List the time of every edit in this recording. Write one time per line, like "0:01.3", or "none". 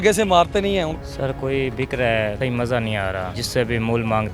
0:00.9
0:02.3
0:03.4

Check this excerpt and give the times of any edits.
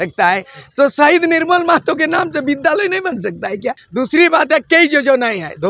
0:03.8

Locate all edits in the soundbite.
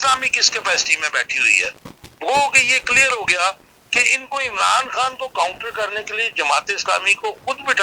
none

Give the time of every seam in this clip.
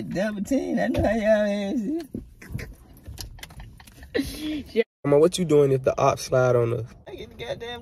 0:04.9

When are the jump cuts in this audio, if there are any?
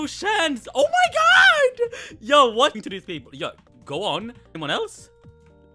0:02.8
0:04.5

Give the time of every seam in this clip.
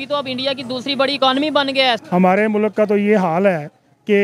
0:02.0

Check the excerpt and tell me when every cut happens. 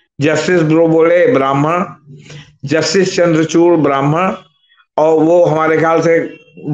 none

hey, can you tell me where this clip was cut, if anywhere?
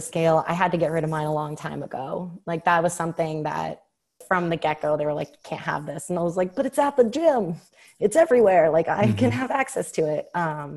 0:04.2

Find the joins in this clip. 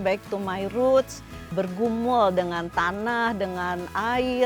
0:01.5

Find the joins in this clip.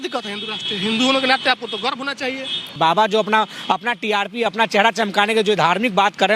0:02.8

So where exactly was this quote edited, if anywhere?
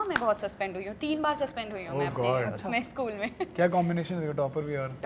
none

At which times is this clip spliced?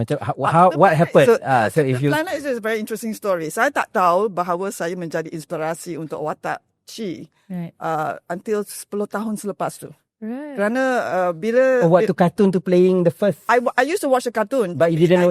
none

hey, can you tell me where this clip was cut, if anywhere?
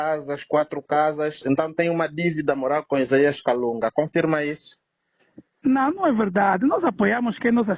none

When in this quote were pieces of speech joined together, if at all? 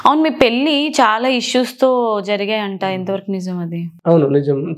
none

